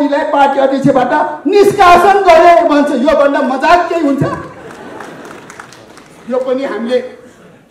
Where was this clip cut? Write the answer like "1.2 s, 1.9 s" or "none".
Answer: none

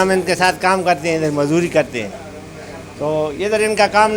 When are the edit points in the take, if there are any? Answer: none

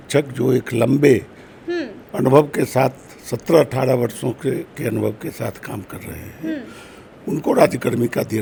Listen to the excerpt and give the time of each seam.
none

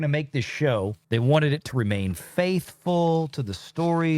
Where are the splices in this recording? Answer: 1.0 s

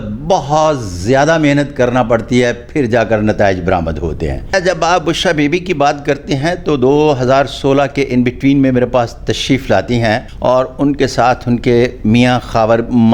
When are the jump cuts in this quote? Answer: 4.5 s, 10.3 s

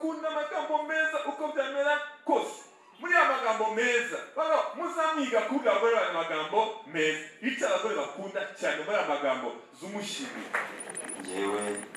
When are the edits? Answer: 10.5 s

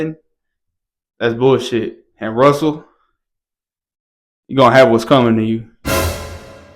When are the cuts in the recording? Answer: 5.7 s

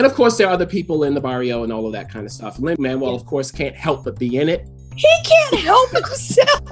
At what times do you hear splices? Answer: none

